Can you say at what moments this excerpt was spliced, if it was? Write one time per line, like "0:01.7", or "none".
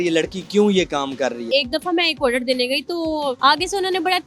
0:01.4
0:03.4